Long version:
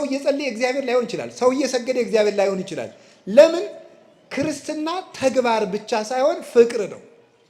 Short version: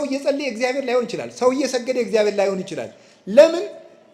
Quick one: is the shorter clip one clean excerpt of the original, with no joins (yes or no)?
yes